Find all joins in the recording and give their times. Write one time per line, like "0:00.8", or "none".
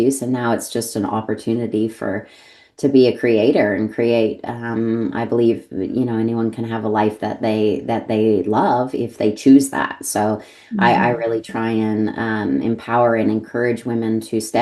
none

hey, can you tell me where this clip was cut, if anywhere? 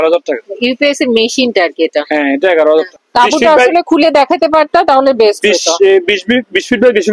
0:03.0

